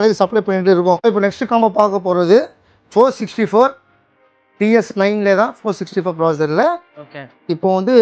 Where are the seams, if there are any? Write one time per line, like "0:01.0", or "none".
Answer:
0:01.1